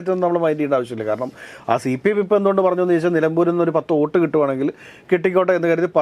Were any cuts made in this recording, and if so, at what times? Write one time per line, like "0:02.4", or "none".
none